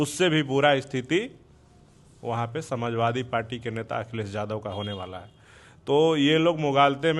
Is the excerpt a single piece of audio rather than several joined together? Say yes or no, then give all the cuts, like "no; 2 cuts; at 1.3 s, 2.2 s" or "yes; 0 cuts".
yes; 0 cuts